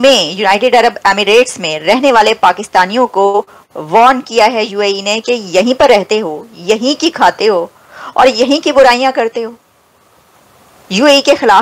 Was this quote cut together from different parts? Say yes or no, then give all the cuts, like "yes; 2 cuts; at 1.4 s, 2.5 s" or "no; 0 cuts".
no; 0 cuts